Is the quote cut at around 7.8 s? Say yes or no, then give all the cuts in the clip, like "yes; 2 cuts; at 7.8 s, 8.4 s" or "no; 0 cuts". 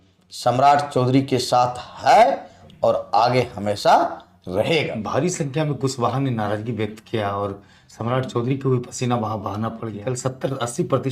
no; 2 cuts; at 5.0 s, 10.0 s